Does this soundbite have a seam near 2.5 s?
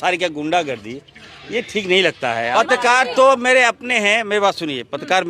yes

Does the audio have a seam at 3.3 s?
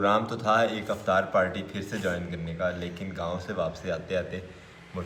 no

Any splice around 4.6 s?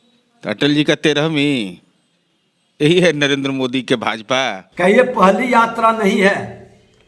yes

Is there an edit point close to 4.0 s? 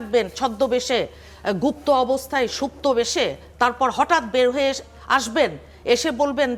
no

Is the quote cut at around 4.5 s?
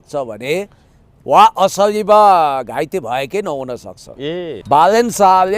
yes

